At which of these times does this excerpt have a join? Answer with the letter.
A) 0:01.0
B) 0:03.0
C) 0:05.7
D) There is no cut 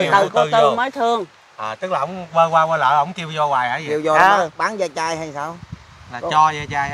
D